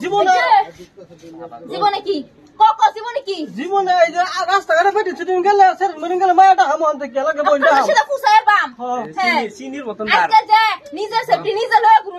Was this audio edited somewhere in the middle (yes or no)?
no